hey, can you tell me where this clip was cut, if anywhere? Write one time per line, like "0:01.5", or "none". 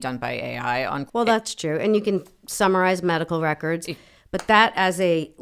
0:01.0